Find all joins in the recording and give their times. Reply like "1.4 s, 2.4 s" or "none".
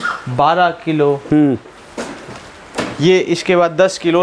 none